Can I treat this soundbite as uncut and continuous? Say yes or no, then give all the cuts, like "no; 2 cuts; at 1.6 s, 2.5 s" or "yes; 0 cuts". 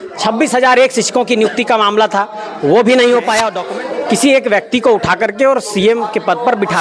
no; 1 cut; at 3.6 s